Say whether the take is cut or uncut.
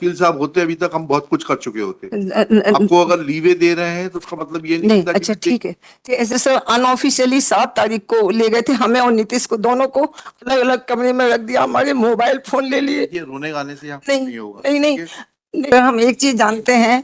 cut